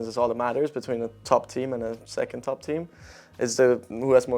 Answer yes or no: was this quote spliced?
no